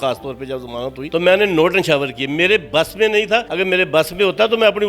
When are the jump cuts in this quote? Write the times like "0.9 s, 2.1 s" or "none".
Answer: 1.0 s, 3.5 s